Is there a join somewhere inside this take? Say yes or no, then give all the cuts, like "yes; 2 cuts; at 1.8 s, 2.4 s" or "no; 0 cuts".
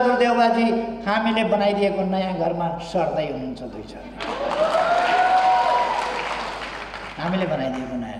no; 0 cuts